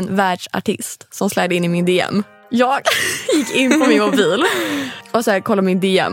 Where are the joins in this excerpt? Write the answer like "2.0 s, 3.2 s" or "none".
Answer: 2.4 s, 4.9 s